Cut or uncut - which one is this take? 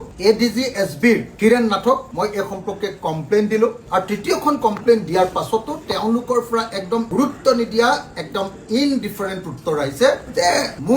cut